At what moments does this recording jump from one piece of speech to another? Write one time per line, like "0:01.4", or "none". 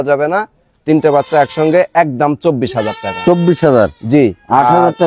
none